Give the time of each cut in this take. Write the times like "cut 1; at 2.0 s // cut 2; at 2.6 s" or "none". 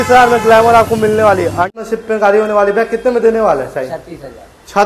cut 1; at 1.7 s